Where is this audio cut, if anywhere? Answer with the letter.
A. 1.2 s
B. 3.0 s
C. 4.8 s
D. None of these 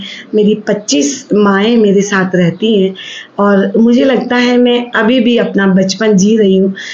D